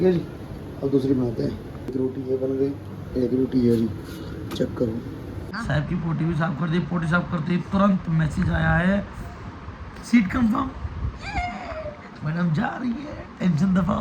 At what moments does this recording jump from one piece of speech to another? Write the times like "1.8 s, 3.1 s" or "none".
5.5 s